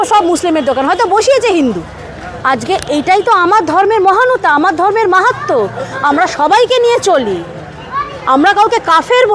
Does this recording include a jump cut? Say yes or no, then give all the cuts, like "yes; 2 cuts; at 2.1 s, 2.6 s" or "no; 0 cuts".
yes; 1 cut; at 2.3 s